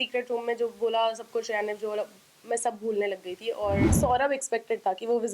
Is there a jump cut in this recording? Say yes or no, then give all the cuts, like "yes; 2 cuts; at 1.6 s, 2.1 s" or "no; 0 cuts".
yes; 1 cut; at 3.9 s